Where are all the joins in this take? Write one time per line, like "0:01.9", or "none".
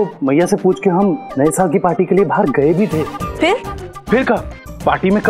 0:03.2

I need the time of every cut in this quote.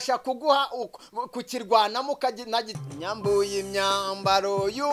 0:02.8

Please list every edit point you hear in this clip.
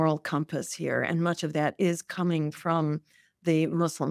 none

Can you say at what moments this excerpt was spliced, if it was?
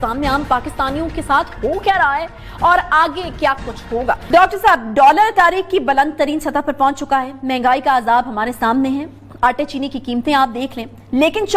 none

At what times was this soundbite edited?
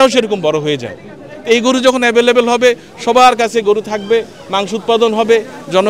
none

